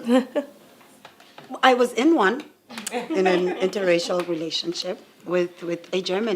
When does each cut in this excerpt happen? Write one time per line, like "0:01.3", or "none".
0:03.7